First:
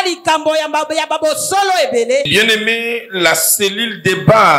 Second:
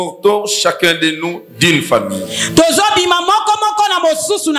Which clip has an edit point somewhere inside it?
first; 1 cut; at 2.3 s

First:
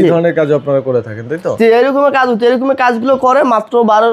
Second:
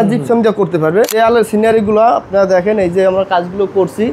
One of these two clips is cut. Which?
second; 1 cut; at 1.1 s

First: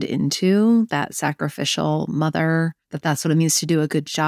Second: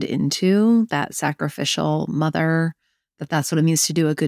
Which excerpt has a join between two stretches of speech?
first; 1 cut; at 2.9 s

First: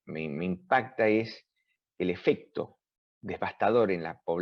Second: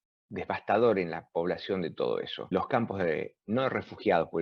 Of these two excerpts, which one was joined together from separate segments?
second; 1 cut; at 2.5 s

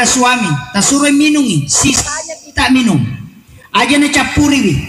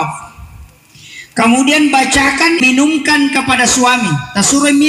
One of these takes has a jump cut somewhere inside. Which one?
second; 1 cut; at 2.6 s

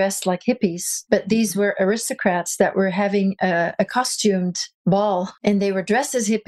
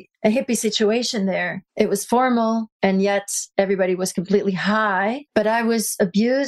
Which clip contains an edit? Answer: second; 1 cut; at 5.2 s

